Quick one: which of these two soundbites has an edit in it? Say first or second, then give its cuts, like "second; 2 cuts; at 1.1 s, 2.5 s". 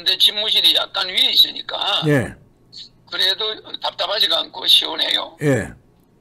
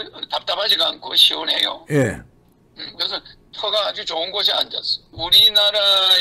second; 1 cut; at 5.1 s